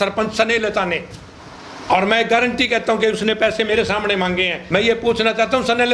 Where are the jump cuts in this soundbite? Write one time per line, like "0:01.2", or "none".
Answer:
0:04.6